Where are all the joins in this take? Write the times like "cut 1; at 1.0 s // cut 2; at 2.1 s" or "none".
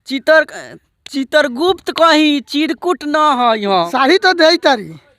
cut 1; at 3.9 s

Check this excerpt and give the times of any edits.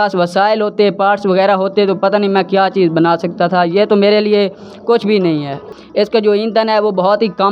cut 1; at 5.7 s

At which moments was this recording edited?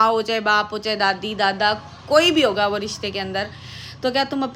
none

